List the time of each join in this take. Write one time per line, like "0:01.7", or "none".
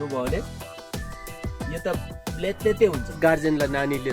0:03.2